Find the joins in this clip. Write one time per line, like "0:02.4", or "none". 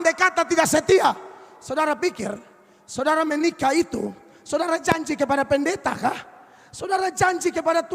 none